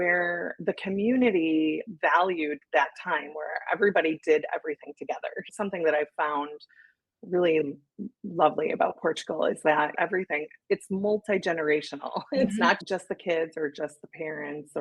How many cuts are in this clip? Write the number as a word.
two